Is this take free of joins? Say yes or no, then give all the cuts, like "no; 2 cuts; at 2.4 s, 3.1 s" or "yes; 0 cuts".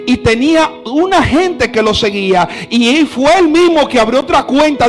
yes; 0 cuts